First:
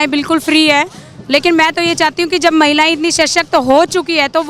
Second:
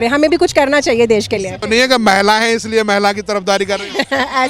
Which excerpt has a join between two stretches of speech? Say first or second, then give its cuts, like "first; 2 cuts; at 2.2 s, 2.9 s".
second; 1 cut; at 1.6 s